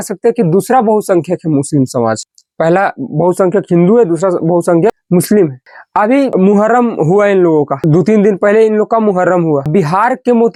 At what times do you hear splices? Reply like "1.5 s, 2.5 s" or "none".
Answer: none